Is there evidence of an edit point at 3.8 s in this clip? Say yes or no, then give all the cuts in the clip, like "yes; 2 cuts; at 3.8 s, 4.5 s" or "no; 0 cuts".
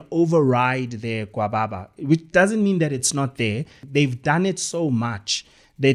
yes; 1 cut; at 3.8 s